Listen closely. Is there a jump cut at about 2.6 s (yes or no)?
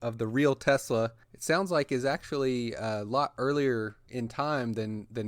no